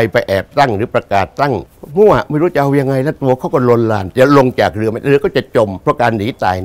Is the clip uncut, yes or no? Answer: no